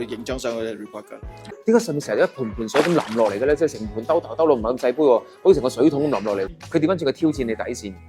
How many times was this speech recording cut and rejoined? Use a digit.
2